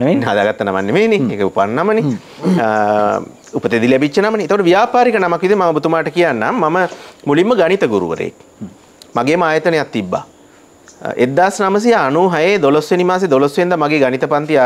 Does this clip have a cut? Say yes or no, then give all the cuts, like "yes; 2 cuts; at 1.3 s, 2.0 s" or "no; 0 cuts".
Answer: no; 0 cuts